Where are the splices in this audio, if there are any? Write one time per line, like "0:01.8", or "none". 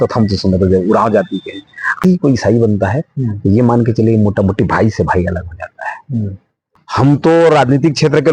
0:02.0
0:06.8